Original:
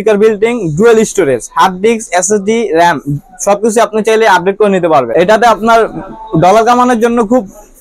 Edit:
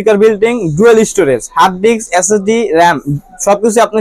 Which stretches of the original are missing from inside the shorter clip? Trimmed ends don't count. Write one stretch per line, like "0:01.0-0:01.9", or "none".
none